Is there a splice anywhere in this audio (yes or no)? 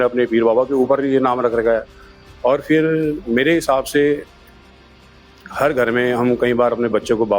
no